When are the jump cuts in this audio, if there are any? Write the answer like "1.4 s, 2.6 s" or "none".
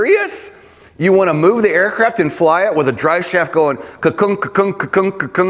none